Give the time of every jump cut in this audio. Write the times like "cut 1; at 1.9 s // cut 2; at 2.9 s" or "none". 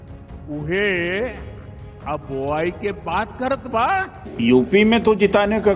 cut 1; at 4.2 s